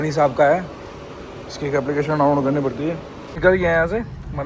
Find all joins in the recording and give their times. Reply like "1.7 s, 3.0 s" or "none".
3.4 s